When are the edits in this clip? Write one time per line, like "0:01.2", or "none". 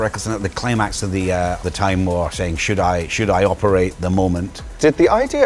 0:01.6
0:04.5